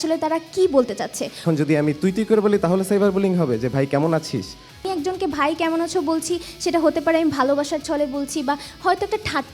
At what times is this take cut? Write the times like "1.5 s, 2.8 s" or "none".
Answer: 1.4 s, 4.9 s